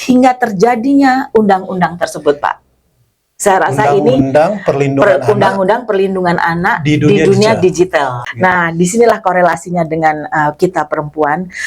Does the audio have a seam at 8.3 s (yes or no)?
yes